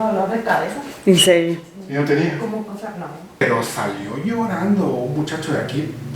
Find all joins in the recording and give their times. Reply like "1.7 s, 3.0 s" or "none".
3.4 s